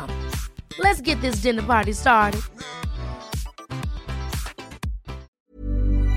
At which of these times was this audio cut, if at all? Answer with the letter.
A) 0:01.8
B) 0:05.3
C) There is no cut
B